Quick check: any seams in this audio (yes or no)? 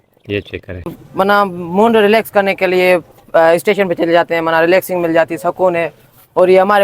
yes